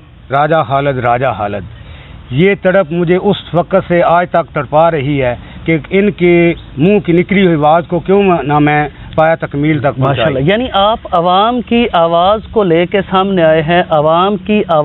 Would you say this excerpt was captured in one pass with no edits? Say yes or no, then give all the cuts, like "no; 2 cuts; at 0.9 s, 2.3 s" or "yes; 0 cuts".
yes; 0 cuts